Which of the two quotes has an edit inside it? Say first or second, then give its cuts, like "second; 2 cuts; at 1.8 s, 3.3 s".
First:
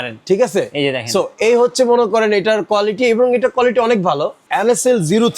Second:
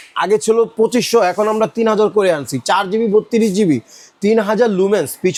first; 1 cut; at 4.5 s